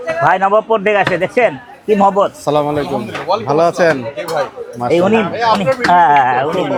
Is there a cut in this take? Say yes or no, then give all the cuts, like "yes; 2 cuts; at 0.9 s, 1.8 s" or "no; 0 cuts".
no; 0 cuts